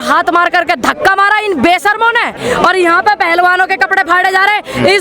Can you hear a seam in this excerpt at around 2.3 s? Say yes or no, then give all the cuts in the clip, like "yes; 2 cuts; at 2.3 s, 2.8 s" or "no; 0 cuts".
yes; 1 cut; at 2.3 s